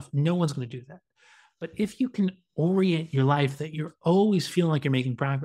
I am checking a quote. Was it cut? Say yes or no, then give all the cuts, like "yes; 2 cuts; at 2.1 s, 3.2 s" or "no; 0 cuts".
no; 0 cuts